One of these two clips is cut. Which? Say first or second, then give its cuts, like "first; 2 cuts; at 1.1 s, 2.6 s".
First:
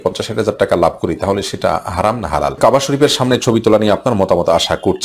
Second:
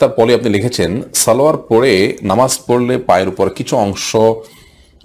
first; 1 cut; at 2.6 s